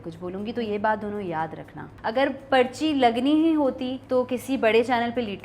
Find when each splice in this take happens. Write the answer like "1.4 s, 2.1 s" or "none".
1.9 s, 3.9 s